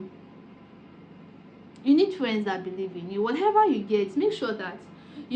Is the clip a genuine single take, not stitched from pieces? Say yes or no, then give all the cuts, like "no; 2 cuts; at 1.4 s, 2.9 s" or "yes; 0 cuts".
yes; 0 cuts